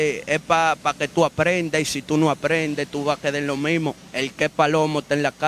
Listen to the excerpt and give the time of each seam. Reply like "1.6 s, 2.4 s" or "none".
4.0 s